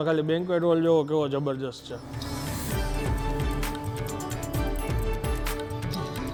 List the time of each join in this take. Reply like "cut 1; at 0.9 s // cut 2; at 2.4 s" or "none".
none